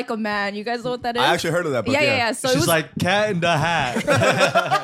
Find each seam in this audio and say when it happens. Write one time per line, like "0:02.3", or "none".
none